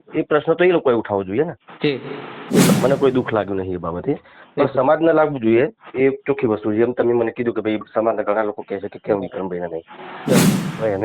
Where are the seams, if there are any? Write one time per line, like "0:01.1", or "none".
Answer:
0:02.7
0:10.4